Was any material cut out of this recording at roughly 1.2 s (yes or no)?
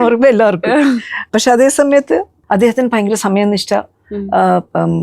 yes